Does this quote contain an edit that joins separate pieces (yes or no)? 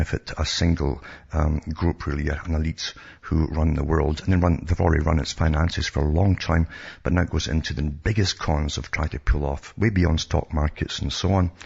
yes